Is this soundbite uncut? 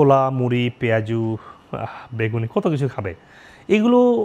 yes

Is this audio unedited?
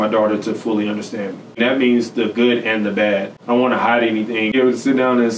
no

